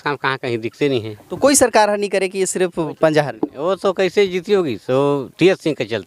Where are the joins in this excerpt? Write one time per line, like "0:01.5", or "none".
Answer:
none